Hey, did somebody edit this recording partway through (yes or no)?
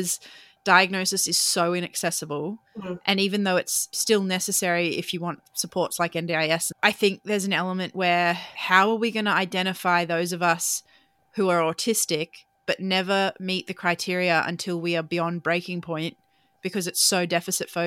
yes